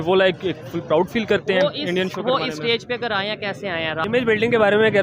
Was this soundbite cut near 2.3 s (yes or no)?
no